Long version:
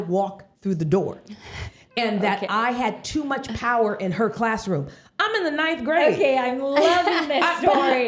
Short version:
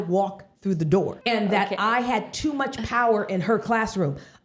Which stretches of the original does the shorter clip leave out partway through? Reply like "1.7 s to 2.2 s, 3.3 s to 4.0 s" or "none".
1.2 s to 1.9 s